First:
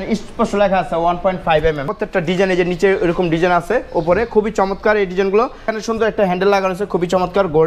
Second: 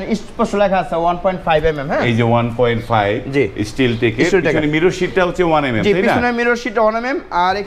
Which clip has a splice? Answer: first; 2 cuts; at 1.9 s, 5.6 s

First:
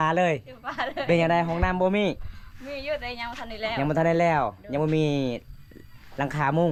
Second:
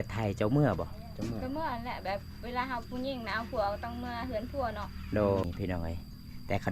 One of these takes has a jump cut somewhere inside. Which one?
second; 1 cut; at 5.4 s

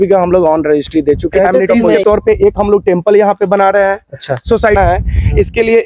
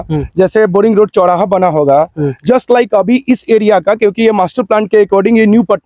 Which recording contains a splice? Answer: first; 2 cuts; at 2.0 s, 4.8 s

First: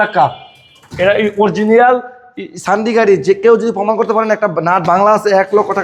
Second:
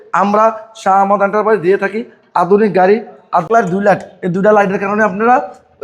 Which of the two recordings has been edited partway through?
second; 1 cut; at 3.5 s

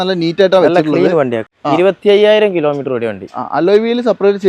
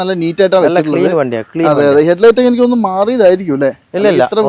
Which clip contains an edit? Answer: first; 1 cut; at 1.5 s

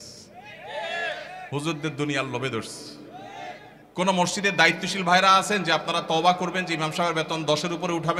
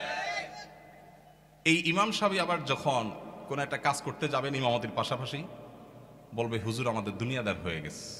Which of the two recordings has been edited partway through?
first; 1 cut; at 3.7 s

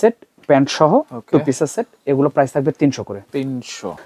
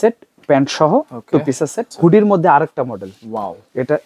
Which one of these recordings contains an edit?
second; 1 cut; at 1.8 s

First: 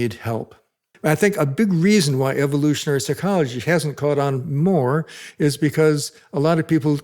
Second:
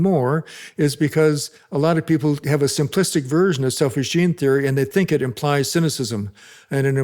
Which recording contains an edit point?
first; 1 cut; at 0.9 s

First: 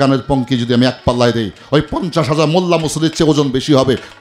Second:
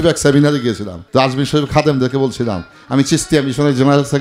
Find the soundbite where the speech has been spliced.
second; 1 cut; at 0.9 s

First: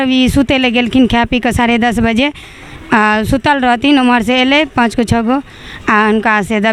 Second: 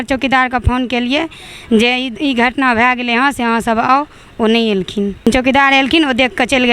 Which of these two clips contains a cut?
second; 1 cut; at 5.3 s

